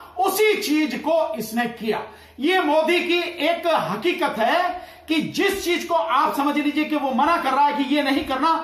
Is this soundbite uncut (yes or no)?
yes